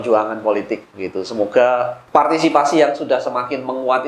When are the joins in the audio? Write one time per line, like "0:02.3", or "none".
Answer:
0:02.0